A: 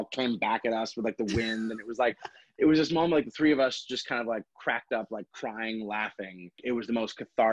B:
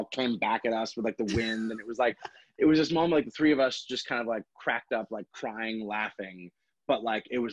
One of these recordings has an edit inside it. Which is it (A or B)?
A